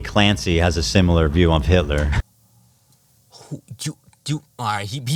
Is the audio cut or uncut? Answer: uncut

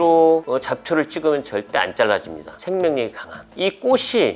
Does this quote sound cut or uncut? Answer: uncut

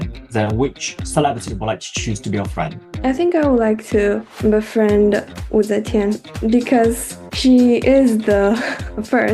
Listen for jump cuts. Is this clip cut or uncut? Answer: cut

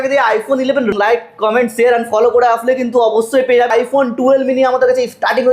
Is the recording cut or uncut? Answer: cut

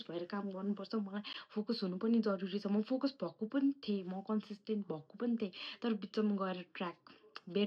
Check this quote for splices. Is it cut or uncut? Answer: uncut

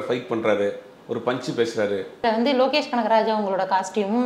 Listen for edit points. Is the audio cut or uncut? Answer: cut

